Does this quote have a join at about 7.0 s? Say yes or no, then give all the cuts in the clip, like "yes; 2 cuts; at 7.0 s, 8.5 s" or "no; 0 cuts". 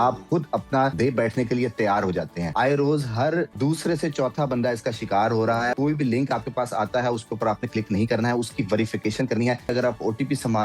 no; 5 cuts; at 0.9 s, 2.4 s, 3.5 s, 5.7 s, 9.7 s